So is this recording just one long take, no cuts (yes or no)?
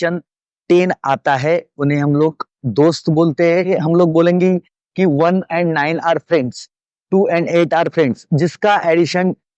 no